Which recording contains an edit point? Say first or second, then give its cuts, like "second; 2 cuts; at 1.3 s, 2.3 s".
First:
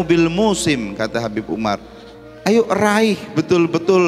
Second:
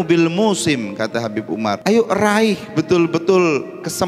second; 1 cut; at 1.8 s